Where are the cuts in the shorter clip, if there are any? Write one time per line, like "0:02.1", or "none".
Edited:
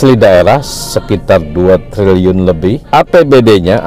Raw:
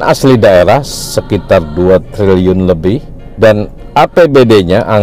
0:02.8

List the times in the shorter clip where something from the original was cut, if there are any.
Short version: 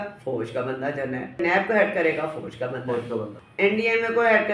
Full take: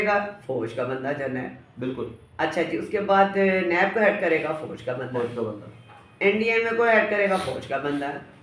0:01.4
0:03.4

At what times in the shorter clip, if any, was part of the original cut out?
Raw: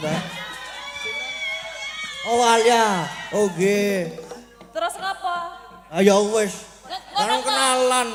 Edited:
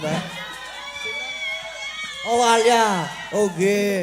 none

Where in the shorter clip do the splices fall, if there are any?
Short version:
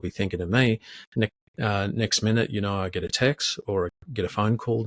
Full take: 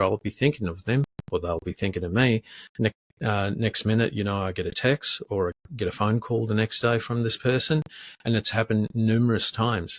none

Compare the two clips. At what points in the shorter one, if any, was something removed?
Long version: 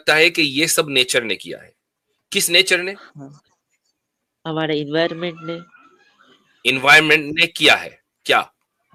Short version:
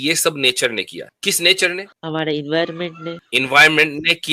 0:01.0
0:01.9
0:03.2

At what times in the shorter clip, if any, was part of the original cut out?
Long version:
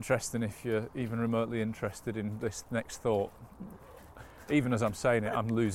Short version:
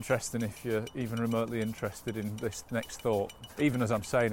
0:03.4

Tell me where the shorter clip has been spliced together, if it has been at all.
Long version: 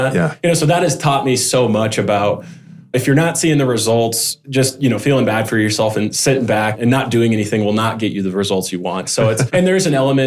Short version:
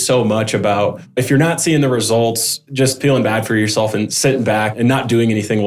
0:01.0
0:03.0

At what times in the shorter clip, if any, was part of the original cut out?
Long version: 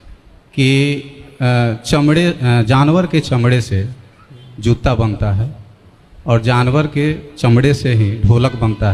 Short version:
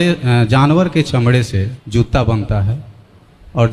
0:01.8

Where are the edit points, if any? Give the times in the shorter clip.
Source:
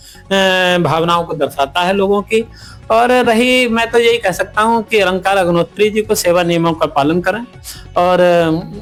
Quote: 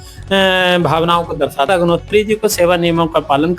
0:01.7

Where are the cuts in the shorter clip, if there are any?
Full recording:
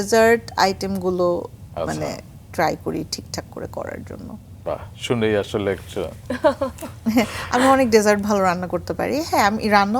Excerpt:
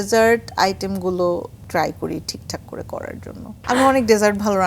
0:01.6
0:03.5

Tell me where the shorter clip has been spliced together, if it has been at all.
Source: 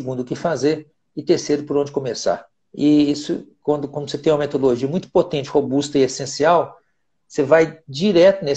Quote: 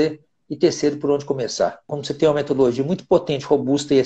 0:01.9

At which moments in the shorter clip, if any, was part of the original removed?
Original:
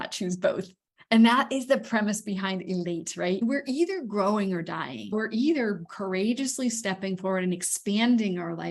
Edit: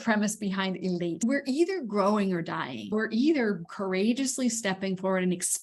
0:01.2

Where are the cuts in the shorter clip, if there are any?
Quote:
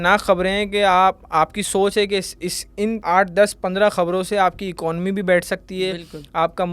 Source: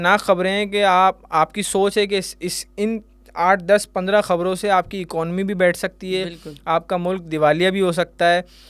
0:03.0

